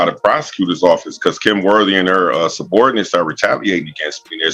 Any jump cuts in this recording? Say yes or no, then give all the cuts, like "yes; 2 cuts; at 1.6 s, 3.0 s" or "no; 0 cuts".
no; 0 cuts